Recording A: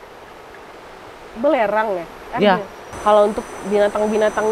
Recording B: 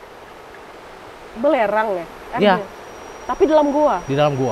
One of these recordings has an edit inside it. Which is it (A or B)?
A